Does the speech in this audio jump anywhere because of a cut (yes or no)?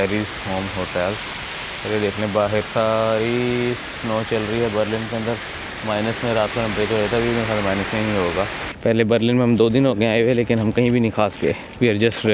yes